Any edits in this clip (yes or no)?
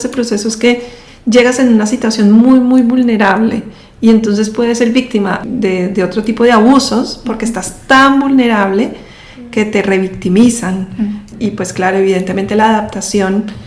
yes